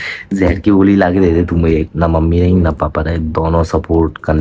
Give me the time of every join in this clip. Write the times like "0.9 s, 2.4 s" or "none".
1.9 s